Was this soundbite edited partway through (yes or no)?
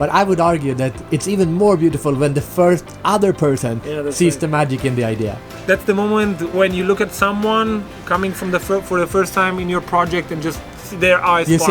yes